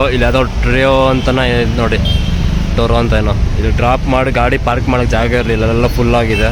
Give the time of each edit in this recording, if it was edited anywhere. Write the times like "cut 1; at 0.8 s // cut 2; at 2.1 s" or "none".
none